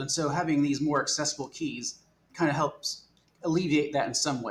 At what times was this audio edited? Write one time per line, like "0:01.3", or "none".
none